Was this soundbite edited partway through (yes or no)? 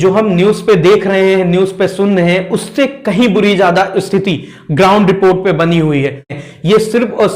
yes